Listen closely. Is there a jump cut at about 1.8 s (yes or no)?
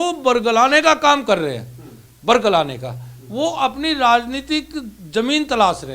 no